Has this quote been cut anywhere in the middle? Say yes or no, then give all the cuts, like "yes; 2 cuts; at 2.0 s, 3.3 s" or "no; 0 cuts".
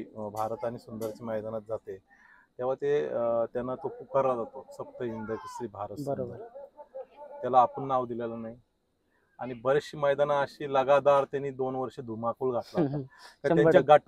no; 0 cuts